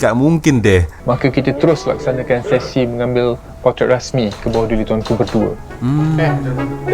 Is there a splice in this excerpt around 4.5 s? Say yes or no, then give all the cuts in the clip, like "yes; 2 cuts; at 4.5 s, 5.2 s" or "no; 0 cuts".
no; 1 cut; at 0.9 s